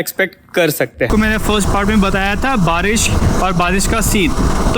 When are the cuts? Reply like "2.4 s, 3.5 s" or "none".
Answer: 1.1 s